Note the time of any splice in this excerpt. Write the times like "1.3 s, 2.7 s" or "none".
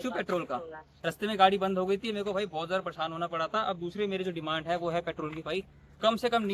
none